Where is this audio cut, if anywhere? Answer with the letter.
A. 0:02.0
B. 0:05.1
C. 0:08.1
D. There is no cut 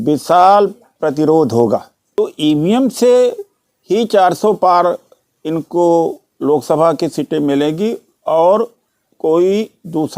A